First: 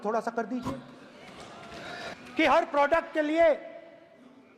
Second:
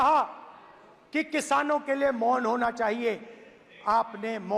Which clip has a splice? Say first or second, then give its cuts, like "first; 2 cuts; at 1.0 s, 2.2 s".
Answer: first; 1 cut; at 2.1 s